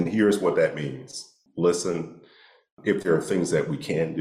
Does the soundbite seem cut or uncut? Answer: cut